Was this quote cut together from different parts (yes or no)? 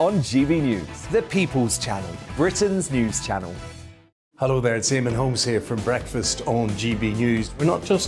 no